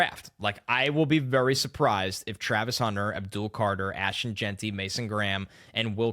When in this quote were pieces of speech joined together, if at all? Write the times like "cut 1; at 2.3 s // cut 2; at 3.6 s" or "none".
none